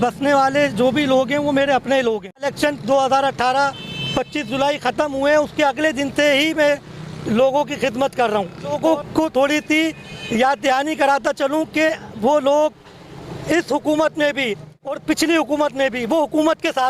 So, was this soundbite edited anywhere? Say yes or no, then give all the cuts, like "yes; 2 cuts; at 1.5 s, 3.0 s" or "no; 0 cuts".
yes; 2 cuts; at 2.5 s, 8.8 s